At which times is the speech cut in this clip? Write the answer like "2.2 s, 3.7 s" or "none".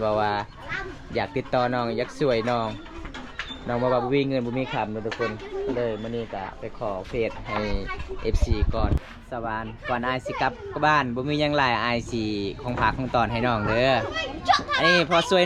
9.1 s